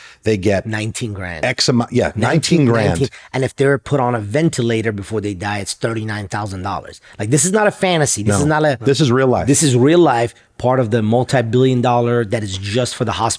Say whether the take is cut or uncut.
uncut